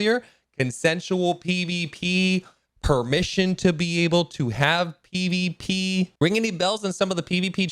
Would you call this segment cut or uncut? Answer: uncut